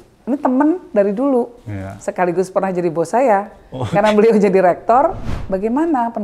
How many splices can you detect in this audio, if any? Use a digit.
1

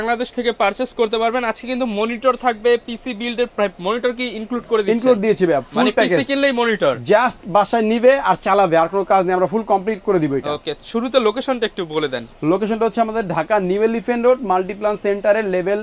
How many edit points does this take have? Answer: 0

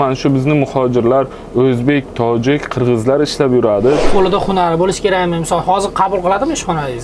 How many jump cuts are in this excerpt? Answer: 1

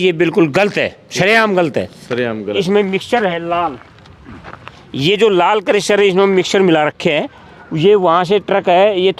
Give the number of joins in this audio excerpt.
1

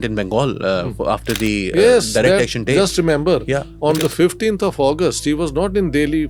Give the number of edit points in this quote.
0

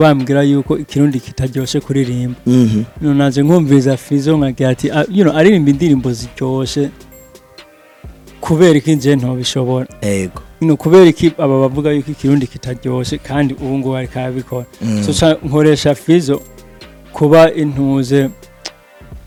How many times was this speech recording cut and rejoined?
0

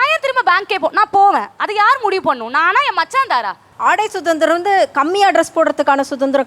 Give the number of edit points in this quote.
1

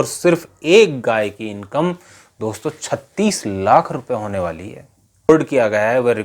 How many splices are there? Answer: 1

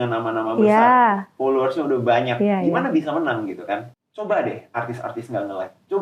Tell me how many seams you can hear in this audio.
1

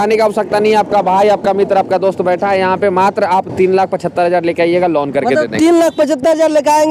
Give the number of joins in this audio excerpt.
0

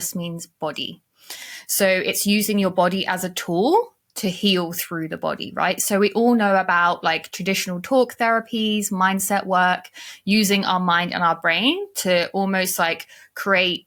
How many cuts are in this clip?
0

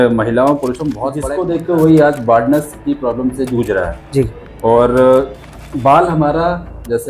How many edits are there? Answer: 1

